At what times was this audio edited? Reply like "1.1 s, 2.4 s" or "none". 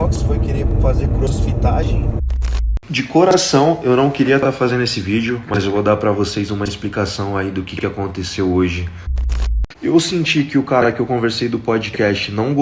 2.7 s, 9.4 s